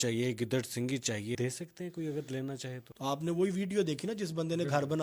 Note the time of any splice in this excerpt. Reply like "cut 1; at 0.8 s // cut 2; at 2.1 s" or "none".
cut 1; at 1.4 s // cut 2; at 2.9 s

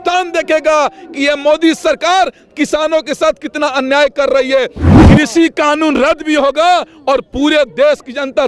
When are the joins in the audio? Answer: cut 1; at 4.9 s

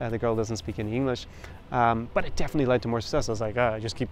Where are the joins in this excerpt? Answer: none

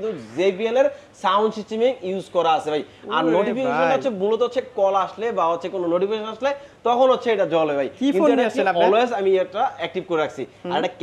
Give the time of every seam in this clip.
none

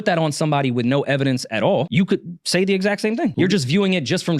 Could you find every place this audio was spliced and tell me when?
cut 1; at 3.3 s

